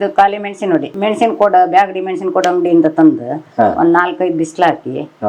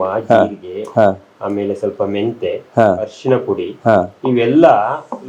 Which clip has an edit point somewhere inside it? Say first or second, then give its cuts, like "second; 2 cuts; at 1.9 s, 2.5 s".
first; 1 cut; at 0.9 s